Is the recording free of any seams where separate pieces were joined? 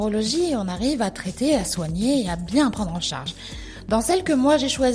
yes; 0 cuts

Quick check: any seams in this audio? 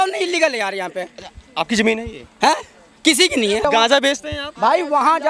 yes; 1 cut; at 3.6 s

